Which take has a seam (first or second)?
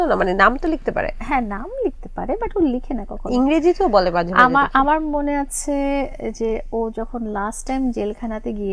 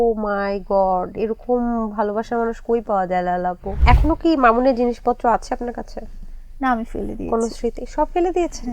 second